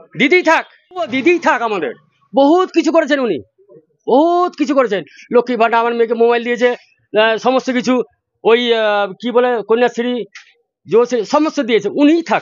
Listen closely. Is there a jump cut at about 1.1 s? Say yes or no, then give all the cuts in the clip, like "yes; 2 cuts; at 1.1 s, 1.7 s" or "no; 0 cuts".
yes; 1 cut; at 1.1 s